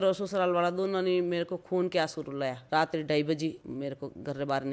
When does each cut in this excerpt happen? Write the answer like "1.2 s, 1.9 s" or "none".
2.6 s, 3.6 s